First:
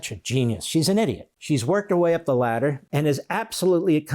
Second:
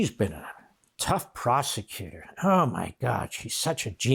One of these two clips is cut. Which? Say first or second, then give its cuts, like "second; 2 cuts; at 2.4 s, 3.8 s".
first; 2 cuts; at 1.3 s, 2.8 s